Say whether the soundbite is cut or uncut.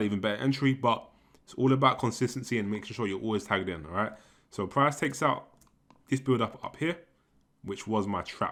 uncut